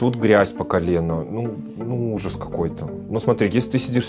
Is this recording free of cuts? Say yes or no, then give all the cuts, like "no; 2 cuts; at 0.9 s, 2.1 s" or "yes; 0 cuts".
yes; 0 cuts